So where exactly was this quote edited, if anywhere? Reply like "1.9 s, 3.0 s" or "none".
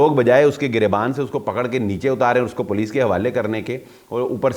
none